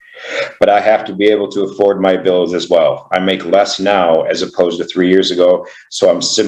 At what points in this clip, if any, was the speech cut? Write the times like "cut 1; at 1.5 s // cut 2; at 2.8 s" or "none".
cut 1; at 3.0 s

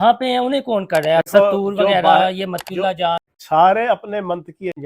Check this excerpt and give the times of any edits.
cut 1; at 3.3 s

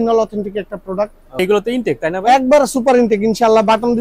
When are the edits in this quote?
cut 1; at 1.4 s

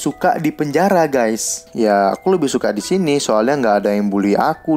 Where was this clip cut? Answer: cut 1; at 1.5 s

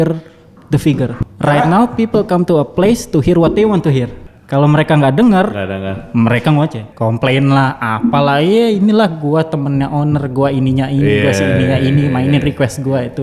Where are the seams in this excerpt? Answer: cut 1; at 1.2 s // cut 2; at 4.2 s // cut 3; at 6.8 s

